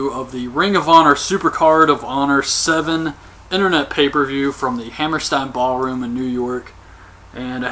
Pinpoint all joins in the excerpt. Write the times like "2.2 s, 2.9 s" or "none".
none